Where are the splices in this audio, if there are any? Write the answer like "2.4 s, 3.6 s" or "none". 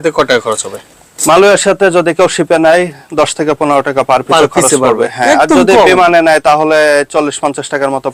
none